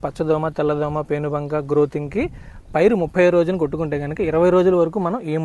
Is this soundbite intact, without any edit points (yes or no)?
yes